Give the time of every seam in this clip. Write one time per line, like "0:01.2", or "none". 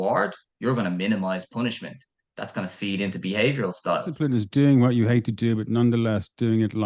0:04.1